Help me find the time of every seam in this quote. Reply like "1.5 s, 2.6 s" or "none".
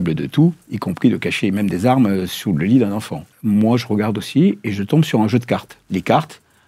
3.3 s, 5.7 s